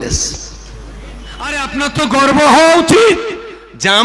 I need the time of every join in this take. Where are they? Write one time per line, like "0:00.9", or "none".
0:01.6